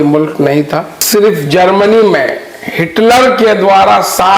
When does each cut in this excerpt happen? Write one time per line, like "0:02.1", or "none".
0:00.9